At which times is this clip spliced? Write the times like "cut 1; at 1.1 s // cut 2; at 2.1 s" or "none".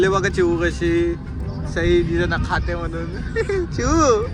none